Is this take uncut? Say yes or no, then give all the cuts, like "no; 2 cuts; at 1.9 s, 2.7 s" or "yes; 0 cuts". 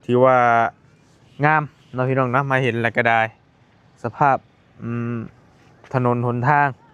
yes; 0 cuts